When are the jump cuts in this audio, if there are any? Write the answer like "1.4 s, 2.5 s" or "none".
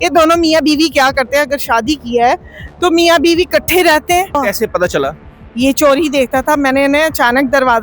4.4 s